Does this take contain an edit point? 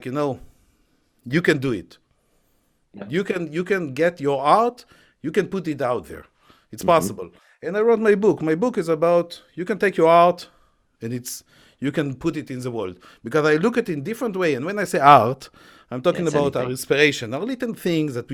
no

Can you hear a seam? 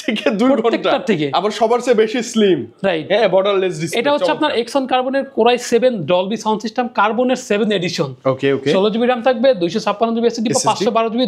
no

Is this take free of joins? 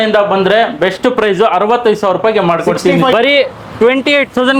no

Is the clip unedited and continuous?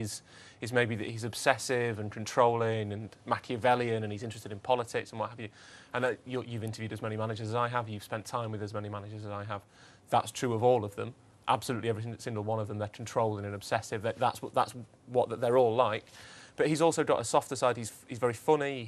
no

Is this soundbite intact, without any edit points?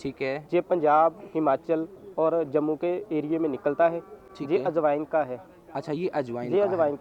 yes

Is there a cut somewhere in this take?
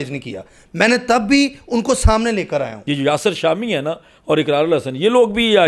yes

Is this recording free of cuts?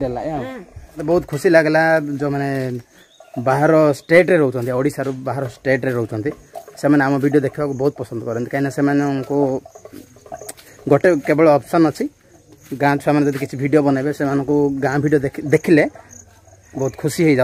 no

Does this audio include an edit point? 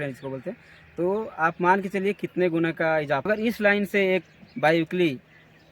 yes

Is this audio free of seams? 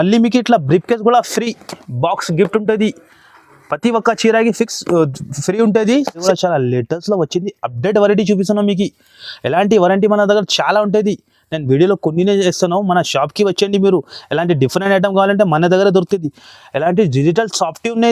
no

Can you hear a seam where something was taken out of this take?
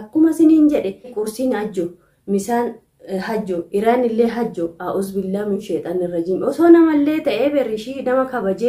yes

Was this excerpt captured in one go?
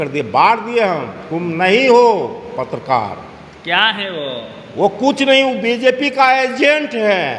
yes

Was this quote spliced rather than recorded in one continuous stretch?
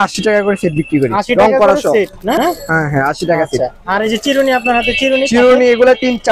no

